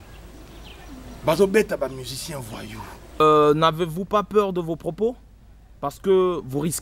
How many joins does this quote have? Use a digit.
1